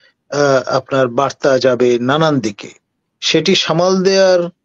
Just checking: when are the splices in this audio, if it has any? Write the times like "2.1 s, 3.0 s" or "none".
none